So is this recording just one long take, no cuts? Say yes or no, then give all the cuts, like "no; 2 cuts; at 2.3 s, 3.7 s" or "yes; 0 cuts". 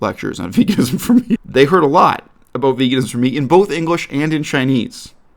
no; 1 cut; at 1.4 s